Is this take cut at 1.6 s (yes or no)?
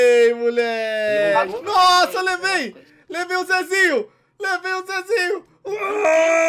yes